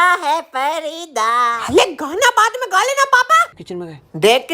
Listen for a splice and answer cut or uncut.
cut